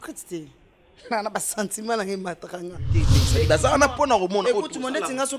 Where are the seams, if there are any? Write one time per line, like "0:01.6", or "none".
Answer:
0:03.2